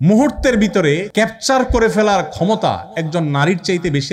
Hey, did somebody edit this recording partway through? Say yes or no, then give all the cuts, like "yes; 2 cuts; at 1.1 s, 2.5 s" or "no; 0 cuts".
yes; 1 cut; at 1.1 s